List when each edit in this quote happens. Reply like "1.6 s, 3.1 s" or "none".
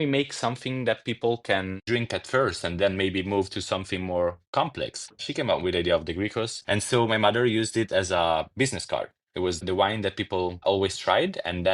5.2 s, 6.6 s, 9.6 s